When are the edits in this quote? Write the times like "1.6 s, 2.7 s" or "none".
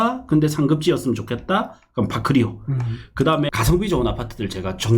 3.5 s